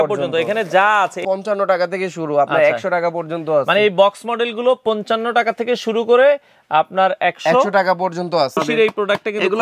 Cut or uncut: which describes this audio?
cut